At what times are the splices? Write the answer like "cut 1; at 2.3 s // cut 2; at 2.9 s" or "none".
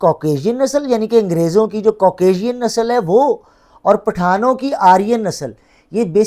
none